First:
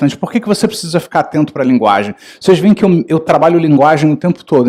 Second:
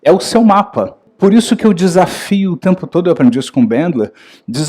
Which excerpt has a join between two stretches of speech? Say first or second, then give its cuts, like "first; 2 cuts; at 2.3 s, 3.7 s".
second; 1 cut; at 1.1 s